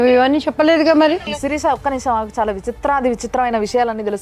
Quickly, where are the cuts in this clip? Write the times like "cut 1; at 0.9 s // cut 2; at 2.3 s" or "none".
cut 1; at 1.2 s